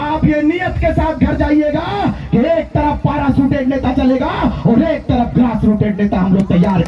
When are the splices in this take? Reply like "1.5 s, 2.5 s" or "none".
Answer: none